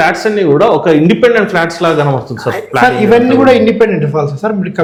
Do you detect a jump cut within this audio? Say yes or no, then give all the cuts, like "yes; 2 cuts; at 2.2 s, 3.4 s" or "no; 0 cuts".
no; 0 cuts